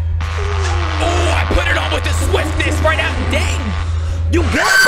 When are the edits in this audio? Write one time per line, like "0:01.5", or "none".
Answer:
none